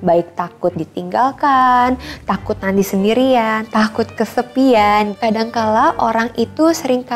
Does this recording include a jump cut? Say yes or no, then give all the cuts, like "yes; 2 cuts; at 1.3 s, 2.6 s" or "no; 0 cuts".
yes; 1 cut; at 5.1 s